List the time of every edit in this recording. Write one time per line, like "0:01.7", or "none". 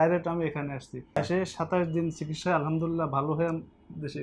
0:01.1